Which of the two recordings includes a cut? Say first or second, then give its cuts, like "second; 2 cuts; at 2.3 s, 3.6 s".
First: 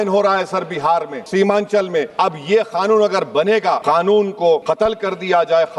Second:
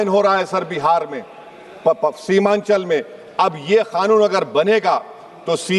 first; 4 cuts; at 1.2 s, 2.1 s, 3.8 s, 4.6 s